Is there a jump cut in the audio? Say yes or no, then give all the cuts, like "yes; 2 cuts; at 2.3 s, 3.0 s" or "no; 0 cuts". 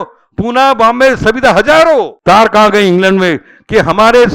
yes; 1 cut; at 2.1 s